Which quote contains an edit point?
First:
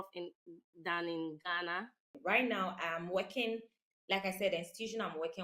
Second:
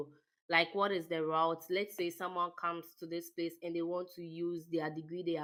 first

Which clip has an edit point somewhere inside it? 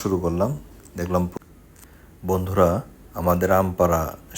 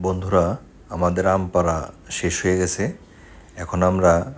first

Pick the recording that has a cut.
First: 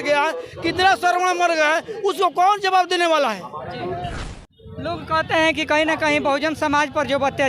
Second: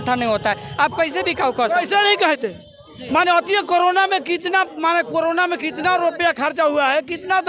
first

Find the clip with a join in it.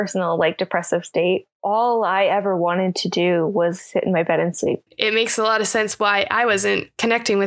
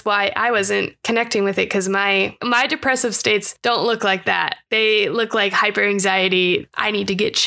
first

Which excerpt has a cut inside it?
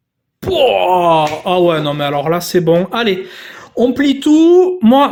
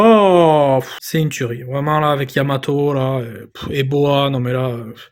second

